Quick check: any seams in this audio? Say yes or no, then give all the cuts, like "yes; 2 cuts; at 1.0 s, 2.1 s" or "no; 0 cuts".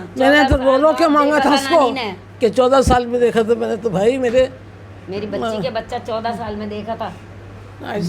no; 0 cuts